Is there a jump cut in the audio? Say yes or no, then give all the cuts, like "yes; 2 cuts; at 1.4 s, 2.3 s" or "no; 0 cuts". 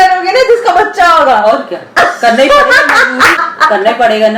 yes; 1 cut; at 3.4 s